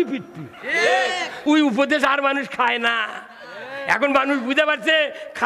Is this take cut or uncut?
cut